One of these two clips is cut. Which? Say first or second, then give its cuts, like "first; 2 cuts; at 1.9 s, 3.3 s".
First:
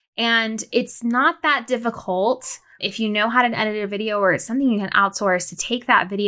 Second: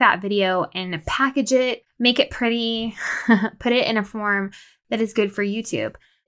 second; 1 cut; at 1.9 s